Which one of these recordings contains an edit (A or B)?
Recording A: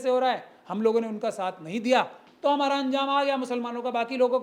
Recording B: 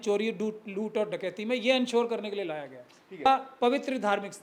B